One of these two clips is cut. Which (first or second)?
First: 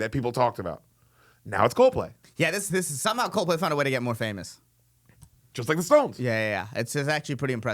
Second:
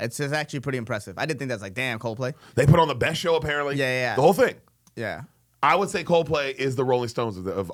first